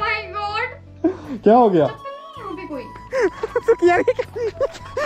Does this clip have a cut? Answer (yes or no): yes